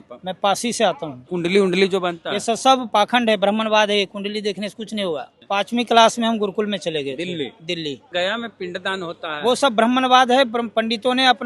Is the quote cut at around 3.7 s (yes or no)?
no